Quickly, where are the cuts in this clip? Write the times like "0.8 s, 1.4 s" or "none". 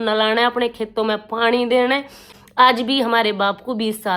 2.3 s

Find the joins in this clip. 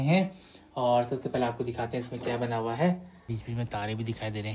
3.3 s

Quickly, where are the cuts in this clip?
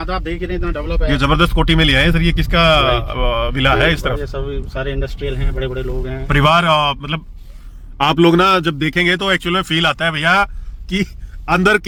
none

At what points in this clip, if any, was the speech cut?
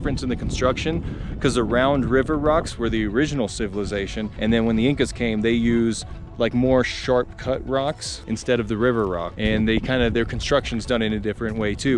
4.3 s, 8.1 s, 9.3 s

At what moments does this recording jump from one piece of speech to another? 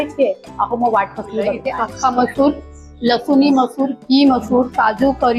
1.5 s

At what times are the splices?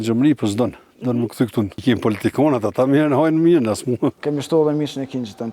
1.7 s, 4.2 s

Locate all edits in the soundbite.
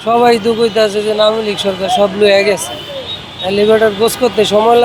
none

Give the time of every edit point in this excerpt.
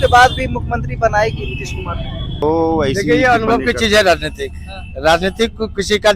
2.3 s

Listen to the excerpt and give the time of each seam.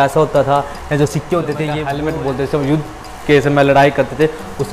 1.8 s

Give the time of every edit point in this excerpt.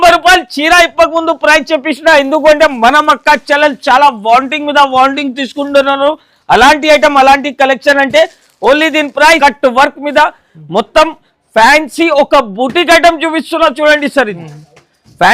9.4 s

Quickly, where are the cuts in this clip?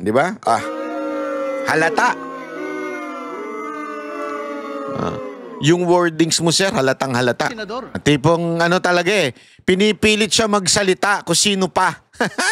8.0 s

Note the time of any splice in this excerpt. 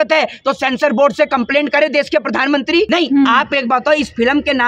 2.9 s

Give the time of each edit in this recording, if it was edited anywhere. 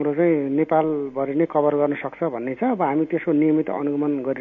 none

